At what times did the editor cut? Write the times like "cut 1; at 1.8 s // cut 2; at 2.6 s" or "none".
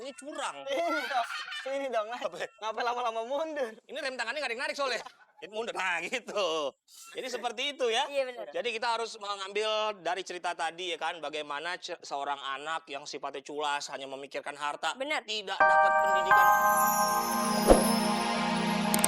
cut 1; at 15.5 s

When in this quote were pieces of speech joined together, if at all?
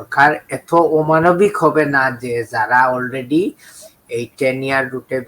none

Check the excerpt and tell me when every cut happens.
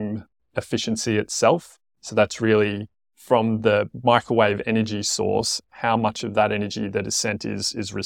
none

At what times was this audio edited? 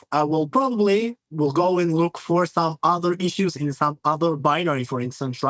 none

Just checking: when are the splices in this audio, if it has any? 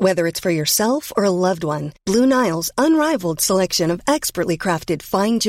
none

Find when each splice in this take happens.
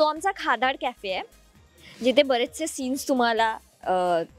none

